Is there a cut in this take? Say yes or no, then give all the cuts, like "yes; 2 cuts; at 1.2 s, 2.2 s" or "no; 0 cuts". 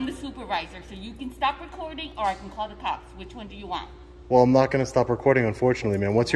no; 0 cuts